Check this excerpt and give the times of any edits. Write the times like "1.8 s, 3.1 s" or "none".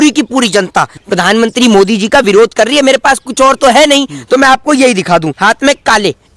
1.0 s, 5.5 s